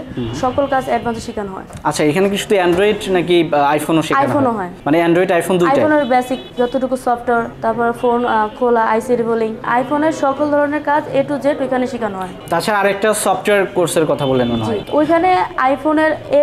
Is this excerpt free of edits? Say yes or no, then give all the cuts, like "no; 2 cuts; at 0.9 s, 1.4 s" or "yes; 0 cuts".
yes; 0 cuts